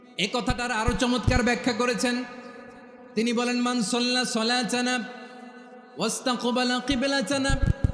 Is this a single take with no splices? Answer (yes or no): yes